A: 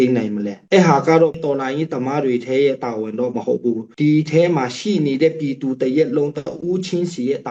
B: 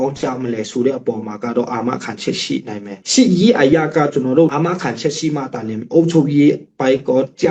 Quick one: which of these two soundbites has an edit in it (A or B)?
B